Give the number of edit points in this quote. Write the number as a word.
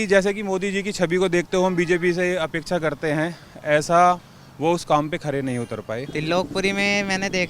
one